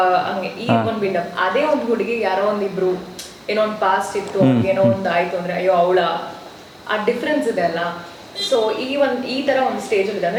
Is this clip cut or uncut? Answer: uncut